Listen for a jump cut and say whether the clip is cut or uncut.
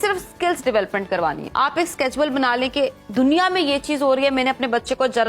cut